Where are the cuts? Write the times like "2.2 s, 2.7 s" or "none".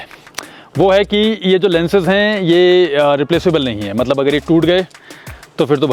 none

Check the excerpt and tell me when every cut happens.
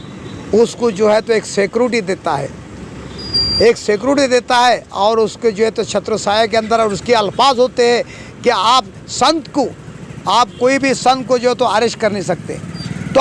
none

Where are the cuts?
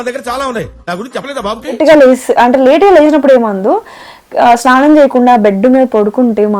1.8 s

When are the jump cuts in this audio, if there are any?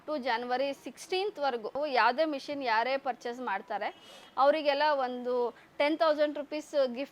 none

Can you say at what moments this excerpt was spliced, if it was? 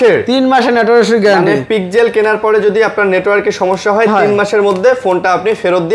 none

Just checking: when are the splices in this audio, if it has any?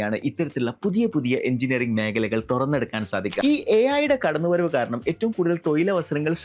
3.4 s

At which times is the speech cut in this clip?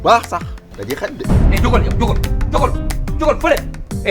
1.1 s

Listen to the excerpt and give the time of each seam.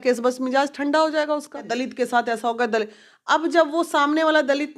1.7 s

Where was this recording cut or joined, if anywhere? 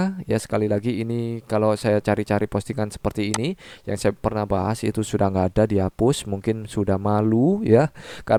none

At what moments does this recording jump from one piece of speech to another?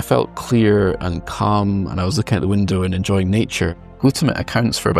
3.9 s

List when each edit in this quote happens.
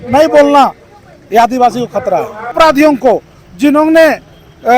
2.5 s

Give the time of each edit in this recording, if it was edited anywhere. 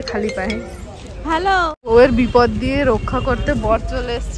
none

